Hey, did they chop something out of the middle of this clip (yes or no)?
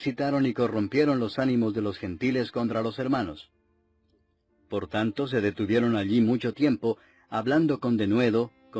no